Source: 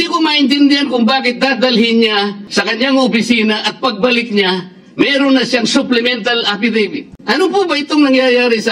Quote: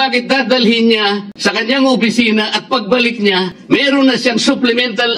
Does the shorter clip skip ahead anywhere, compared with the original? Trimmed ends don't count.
yes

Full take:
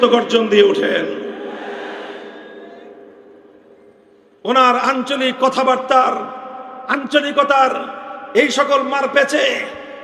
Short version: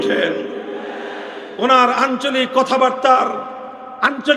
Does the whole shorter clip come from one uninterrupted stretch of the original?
no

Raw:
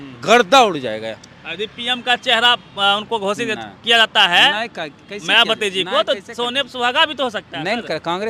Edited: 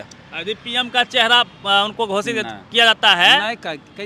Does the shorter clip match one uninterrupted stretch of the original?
yes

